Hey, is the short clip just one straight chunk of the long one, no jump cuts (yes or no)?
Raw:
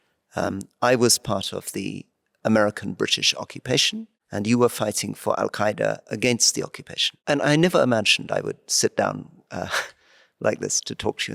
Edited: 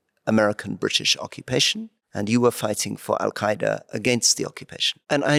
yes